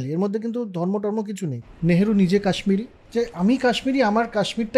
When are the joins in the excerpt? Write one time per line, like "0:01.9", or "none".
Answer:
0:01.6
0:03.0